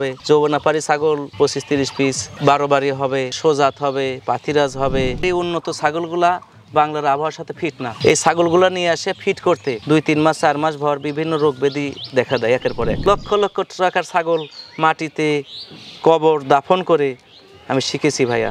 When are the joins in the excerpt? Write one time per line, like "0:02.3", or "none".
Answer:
0:05.2
0:13.0